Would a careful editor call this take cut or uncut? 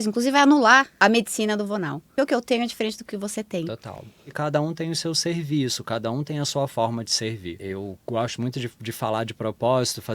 cut